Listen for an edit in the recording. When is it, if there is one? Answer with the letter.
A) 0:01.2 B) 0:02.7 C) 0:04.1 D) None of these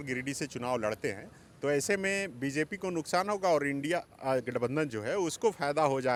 D